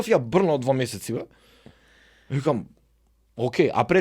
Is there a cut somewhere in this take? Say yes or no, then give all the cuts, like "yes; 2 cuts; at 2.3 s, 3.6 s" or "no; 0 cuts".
no; 0 cuts